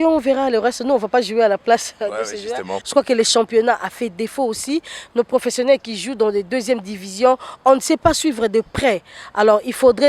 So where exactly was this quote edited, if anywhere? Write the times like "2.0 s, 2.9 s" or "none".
2.8 s